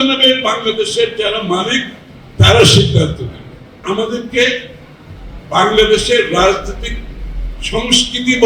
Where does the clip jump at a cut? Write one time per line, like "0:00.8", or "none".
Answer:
0:03.8